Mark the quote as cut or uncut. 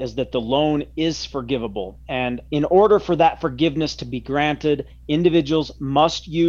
uncut